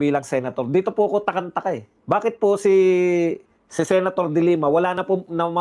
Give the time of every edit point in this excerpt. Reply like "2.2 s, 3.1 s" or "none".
1.9 s

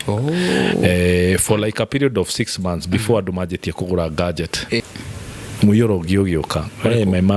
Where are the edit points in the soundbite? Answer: 4.8 s

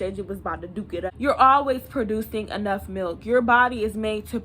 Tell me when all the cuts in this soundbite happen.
1.1 s

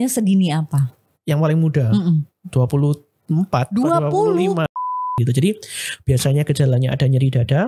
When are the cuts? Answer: 4.9 s

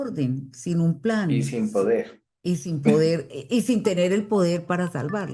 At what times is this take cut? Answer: none

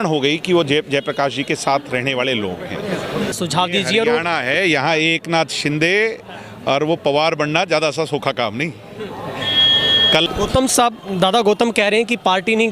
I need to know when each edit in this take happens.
3.3 s, 10.3 s

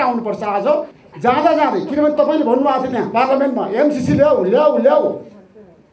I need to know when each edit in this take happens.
1.0 s

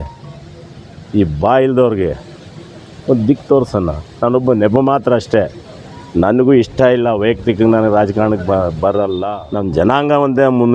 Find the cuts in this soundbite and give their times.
9.4 s

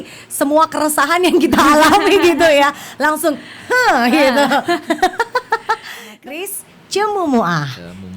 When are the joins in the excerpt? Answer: 6.3 s

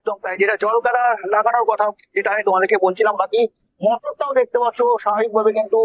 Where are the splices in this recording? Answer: none

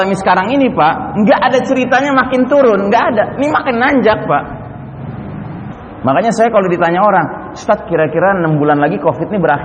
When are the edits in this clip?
5.7 s

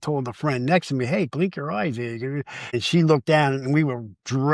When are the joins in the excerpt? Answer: 2.8 s

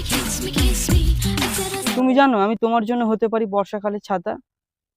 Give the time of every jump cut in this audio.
1.9 s

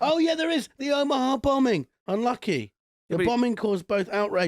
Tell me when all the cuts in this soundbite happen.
1.9 s

